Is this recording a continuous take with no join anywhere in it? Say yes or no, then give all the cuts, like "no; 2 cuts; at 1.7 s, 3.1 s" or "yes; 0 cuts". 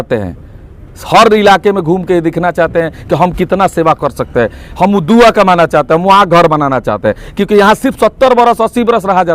yes; 0 cuts